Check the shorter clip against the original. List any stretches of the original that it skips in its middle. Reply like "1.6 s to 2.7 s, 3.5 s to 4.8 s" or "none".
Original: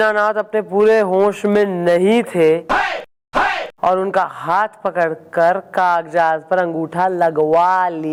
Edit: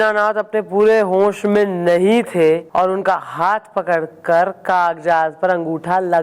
2.6 s to 3.7 s

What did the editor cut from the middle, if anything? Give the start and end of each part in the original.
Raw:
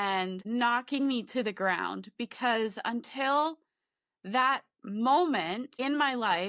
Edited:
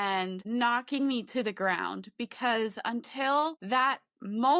3.6 s to 4.2 s

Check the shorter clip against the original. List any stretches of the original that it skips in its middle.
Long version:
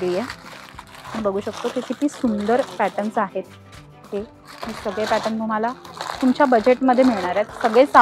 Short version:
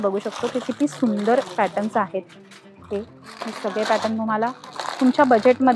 none

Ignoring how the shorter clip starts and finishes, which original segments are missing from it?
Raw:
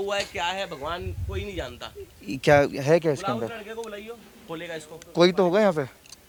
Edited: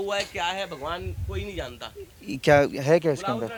none

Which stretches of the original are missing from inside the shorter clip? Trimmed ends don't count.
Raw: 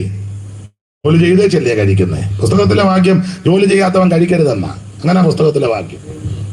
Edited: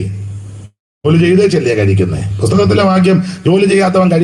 none

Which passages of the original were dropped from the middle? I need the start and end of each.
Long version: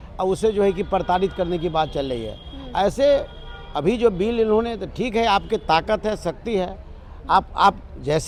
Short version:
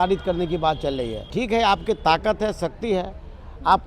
2.3 s to 4.9 s

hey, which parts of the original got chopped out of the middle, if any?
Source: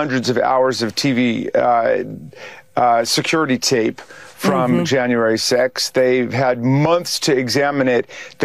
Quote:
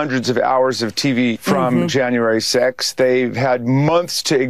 1.4 s to 4.3 s

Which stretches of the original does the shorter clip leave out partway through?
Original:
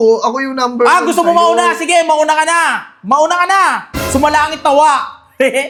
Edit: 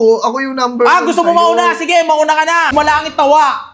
2.7 s to 4.2 s

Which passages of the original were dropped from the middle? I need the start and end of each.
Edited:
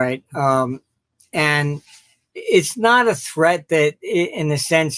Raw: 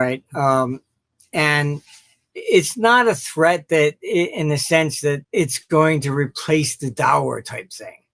none

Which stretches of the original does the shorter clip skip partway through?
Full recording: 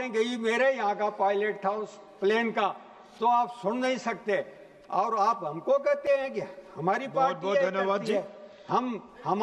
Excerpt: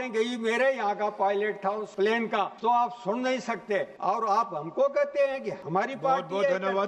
2.2 s to 2.7 s, 4.5 s to 4.8 s, 6.4 s to 6.7 s

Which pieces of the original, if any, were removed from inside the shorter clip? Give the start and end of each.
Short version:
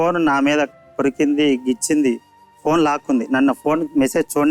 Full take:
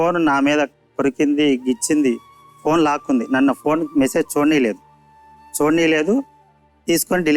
none

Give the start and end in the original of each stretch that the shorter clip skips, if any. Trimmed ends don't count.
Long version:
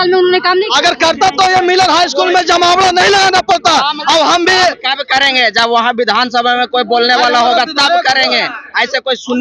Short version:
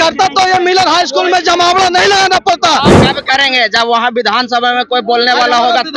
4.0 s to 4.8 s

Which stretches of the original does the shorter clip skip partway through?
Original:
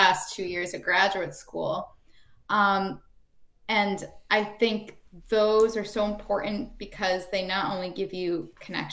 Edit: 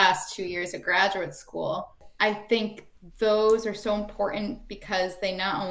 2.0 s to 4.1 s

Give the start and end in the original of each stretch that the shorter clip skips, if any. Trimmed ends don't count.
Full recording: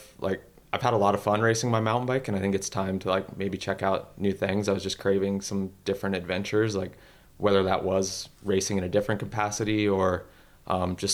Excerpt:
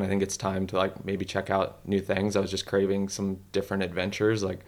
none

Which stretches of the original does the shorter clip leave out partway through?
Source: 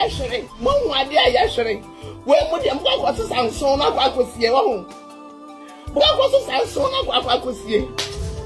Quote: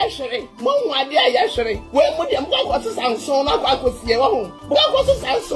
1.8 s to 2.1 s, 4.9 s to 5.8 s

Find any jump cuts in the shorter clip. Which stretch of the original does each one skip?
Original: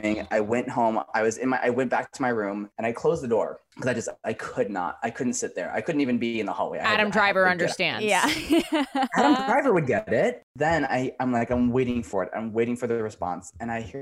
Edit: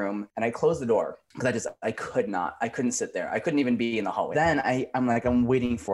6.7 s to 10.5 s

